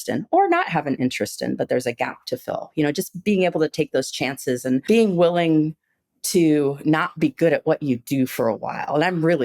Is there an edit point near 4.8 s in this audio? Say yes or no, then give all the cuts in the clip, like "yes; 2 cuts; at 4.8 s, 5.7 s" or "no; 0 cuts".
yes; 1 cut; at 4.8 s